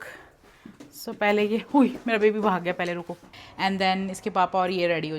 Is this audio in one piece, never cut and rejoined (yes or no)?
no